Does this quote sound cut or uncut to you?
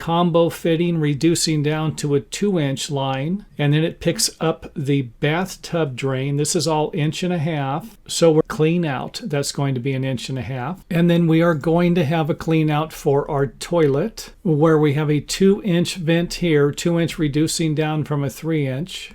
cut